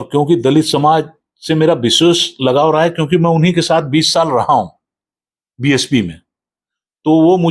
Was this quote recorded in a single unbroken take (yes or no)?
yes